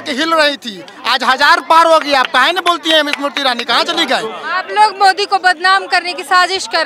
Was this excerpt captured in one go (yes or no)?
no